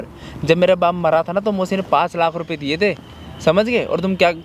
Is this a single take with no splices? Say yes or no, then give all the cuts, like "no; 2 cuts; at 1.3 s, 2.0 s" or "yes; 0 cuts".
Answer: yes; 0 cuts